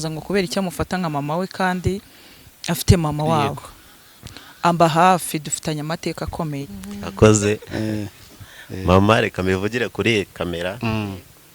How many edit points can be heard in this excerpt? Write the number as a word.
one